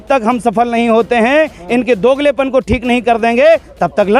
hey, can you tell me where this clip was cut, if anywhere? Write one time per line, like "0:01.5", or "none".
none